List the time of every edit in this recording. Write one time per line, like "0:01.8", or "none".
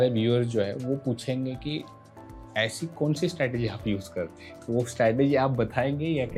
none